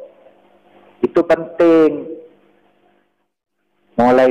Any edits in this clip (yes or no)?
yes